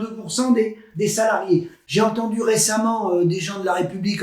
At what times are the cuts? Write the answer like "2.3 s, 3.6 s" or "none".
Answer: 1.8 s